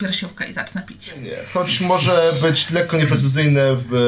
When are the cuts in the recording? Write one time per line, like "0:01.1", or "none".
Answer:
0:01.4